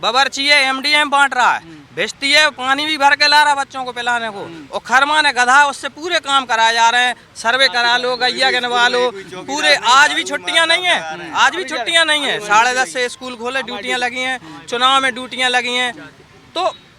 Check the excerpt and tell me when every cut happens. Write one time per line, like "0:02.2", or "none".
none